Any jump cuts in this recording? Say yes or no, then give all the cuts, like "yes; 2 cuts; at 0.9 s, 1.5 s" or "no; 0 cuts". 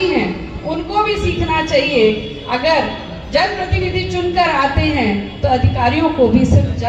no; 0 cuts